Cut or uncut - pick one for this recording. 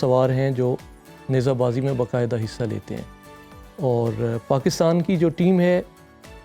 uncut